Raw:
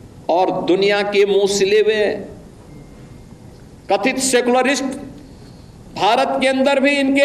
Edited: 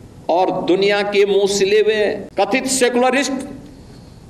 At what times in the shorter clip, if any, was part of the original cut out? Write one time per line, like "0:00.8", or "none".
0:02.2